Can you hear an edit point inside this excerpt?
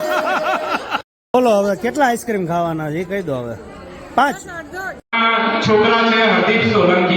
yes; 2 cuts; at 1.2 s, 5.1 s

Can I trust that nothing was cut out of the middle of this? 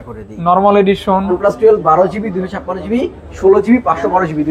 no; 1 cut; at 1.4 s

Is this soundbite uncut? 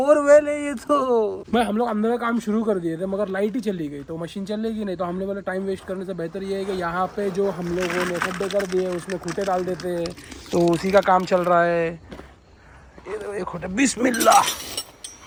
yes; 0 cuts

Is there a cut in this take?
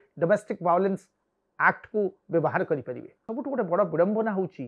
yes; 1 cut; at 3.2 s

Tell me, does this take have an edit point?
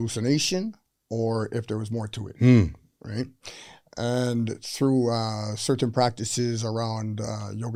no; 0 cuts

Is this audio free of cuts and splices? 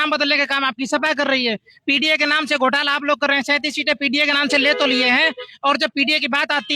yes; 0 cuts

